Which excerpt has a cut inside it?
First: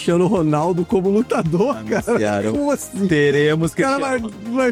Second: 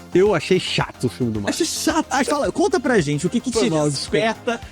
second; 1 cut; at 2.3 s

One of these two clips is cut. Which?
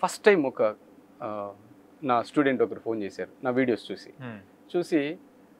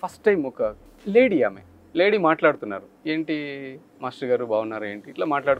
second; 1 cut; at 0.9 s

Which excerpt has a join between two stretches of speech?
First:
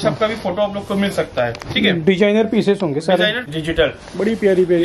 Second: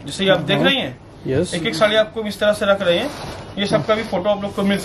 first; 1 cut; at 3.5 s

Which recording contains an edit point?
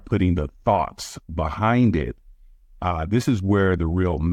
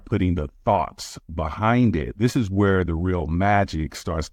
second; 1 cut; at 2.1 s

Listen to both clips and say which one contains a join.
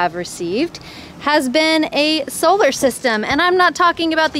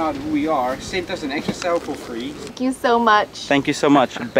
second; 1 cut; at 2.8 s

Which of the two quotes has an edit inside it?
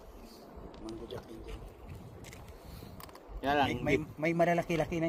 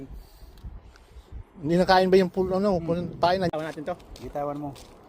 second; 1 cut; at 3.5 s

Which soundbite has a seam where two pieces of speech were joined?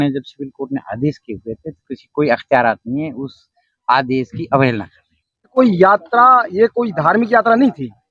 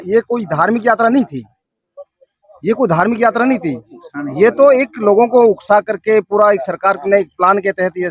first; 1 cut; at 5.5 s

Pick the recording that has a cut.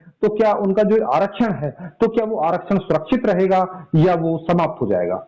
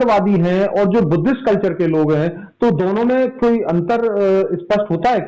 first; 1 cut; at 1.8 s

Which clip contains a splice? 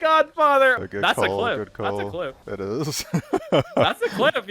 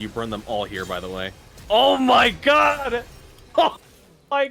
first; 2 cuts; at 0.8 s, 2.5 s

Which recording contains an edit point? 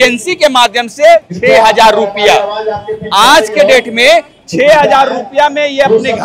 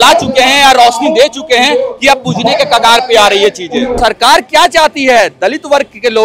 second; 1 cut; at 4.0 s

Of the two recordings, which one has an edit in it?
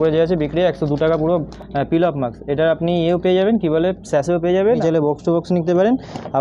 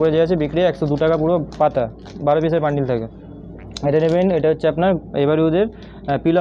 first; 2 cuts; at 1.5 s, 4.8 s

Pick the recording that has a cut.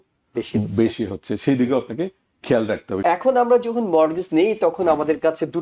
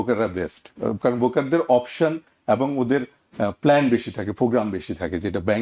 first; 1 cut; at 3.0 s

